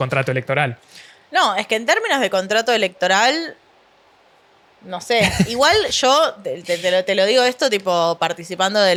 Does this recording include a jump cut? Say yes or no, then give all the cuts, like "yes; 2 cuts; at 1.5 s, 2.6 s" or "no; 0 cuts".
no; 0 cuts